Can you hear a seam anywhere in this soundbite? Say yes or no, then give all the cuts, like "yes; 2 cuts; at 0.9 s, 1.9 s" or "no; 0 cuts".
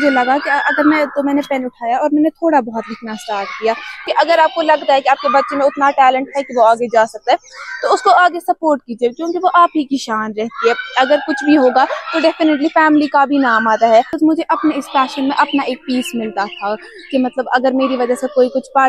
yes; 2 cuts; at 4.0 s, 14.1 s